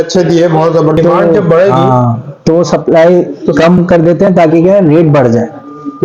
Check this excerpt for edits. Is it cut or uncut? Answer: cut